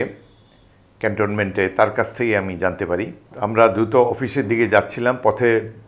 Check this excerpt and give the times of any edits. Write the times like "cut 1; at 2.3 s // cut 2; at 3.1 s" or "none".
cut 1; at 3.2 s